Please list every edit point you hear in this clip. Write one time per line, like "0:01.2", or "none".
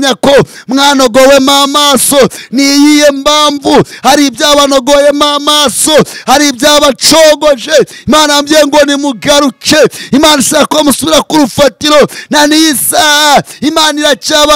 none